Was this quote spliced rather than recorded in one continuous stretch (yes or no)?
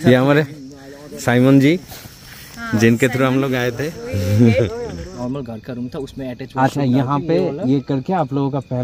yes